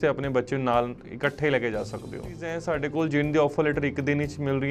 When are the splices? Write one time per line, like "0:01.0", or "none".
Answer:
0:02.6